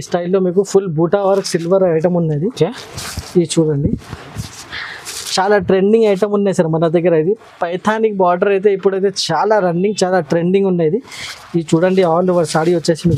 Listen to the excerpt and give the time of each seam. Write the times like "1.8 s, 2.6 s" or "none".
none